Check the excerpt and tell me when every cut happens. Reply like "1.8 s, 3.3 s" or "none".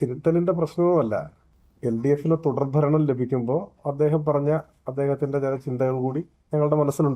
none